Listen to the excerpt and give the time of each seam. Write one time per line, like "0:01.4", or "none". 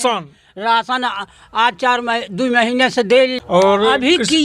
0:03.3